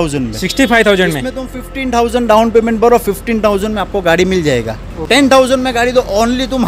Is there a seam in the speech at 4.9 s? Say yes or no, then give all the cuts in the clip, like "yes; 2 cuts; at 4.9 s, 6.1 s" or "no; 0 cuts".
yes; 1 cut; at 4.9 s